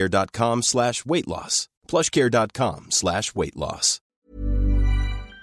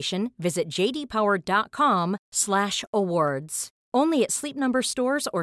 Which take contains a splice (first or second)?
first